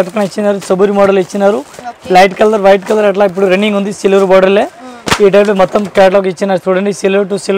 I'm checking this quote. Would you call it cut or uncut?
uncut